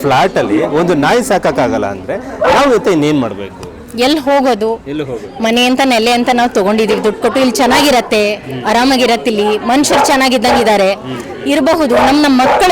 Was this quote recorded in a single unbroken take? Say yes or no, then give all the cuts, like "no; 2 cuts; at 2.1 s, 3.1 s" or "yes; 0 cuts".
yes; 0 cuts